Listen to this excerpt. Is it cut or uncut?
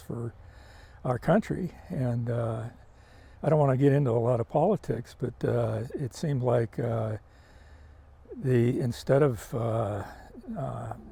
uncut